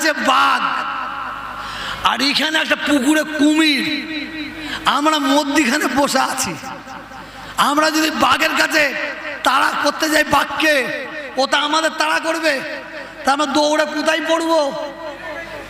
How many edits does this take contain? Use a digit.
0